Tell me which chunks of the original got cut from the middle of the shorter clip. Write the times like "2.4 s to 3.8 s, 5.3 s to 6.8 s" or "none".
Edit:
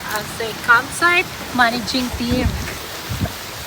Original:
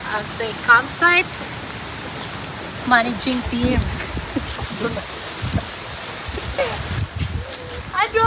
1.4 s to 2.7 s, 4.1 s to 5.1 s